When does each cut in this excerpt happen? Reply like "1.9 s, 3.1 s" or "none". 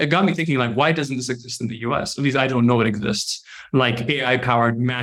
none